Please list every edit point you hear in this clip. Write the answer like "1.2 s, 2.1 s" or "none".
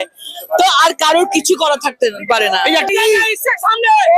2.9 s